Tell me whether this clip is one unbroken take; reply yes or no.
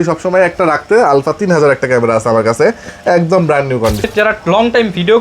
no